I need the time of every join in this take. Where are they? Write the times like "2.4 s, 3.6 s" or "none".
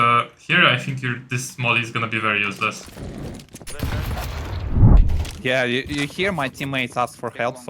5.0 s